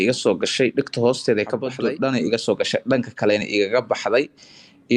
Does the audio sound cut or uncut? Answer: cut